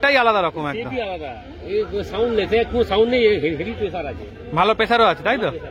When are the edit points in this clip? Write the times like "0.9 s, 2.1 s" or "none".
none